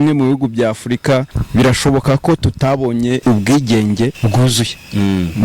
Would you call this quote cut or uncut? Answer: cut